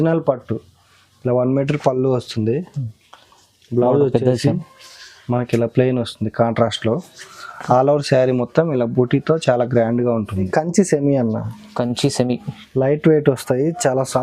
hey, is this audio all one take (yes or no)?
no